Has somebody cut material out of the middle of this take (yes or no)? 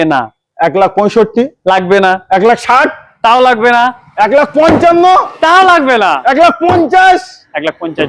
no